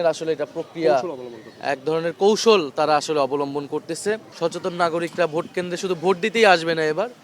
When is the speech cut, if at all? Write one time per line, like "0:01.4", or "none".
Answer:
0:04.3